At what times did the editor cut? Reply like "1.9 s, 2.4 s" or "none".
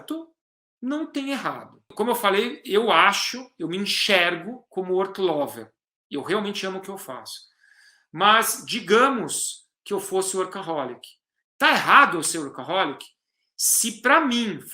1.9 s